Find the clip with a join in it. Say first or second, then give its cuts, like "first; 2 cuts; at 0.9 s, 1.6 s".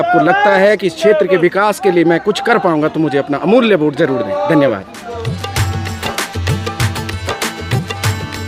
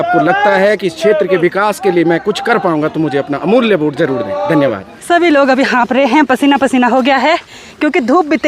second; 1 cut; at 4.9 s